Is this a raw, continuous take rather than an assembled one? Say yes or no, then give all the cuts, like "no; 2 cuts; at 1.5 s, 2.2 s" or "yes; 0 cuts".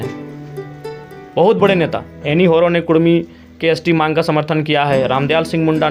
yes; 0 cuts